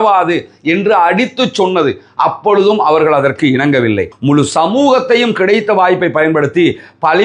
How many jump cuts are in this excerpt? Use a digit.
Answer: 1